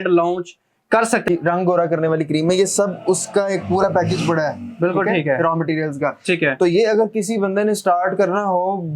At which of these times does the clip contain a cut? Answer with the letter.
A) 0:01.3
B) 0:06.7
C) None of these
A